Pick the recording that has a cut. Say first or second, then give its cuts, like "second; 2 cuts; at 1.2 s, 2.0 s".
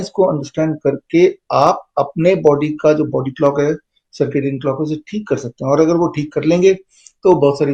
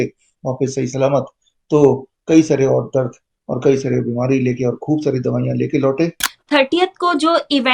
second; 1 cut; at 6.2 s